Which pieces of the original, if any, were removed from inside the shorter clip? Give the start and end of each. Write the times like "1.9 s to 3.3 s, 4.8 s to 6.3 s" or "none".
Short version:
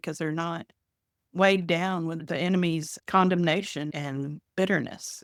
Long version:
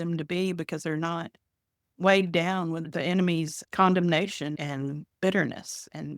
none